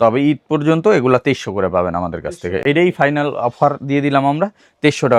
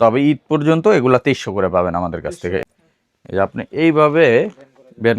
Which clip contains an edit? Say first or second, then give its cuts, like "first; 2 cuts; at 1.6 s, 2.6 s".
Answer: second; 1 cut; at 2.6 s